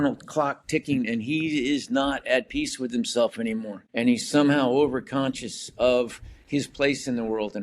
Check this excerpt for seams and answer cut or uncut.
cut